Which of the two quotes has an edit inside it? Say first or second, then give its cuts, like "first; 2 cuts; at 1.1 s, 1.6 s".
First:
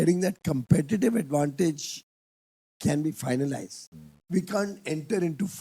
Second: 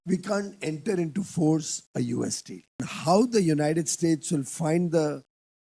second; 1 cut; at 2.9 s